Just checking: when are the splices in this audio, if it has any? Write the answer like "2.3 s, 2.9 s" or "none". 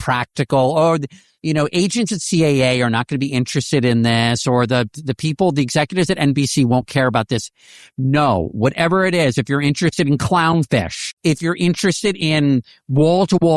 11.0 s